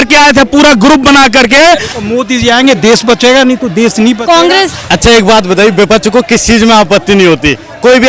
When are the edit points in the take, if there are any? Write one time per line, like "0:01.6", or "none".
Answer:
0:01.9
0:04.8